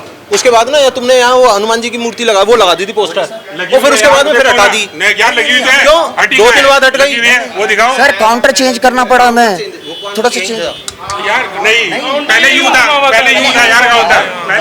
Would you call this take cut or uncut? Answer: uncut